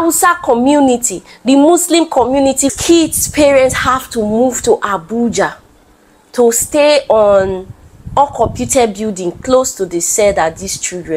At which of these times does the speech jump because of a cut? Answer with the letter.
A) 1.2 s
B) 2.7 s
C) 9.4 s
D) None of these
B